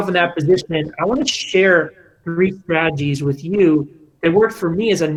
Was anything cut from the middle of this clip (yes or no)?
no